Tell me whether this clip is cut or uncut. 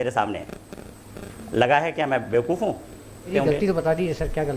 cut